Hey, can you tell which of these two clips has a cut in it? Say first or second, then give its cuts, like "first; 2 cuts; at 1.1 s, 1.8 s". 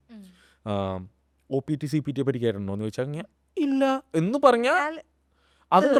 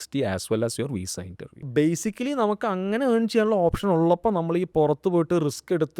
second; 1 cut; at 1.6 s